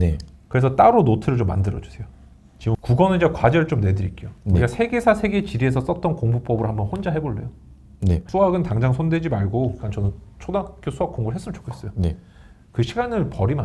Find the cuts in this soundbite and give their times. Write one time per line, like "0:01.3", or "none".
0:02.8
0:08.2
0:09.9

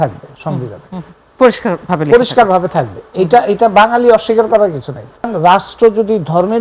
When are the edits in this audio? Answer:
0:05.3

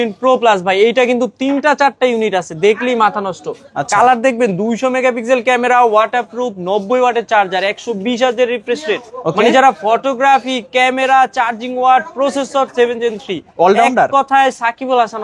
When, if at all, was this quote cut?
none

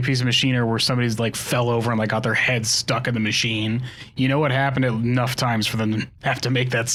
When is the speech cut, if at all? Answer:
none

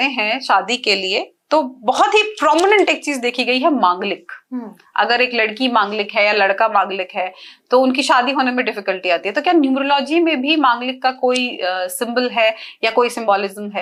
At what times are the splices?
none

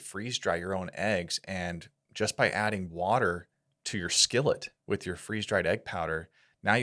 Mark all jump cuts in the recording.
none

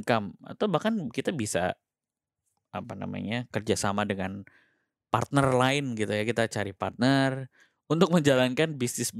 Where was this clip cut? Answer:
none

